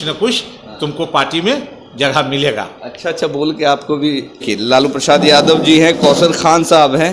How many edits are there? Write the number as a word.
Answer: one